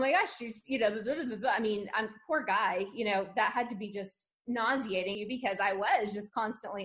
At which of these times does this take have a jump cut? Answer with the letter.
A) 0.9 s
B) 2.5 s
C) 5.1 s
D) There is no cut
C